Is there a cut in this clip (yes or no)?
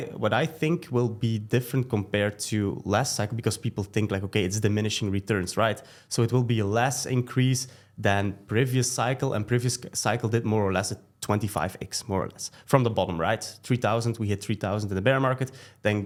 no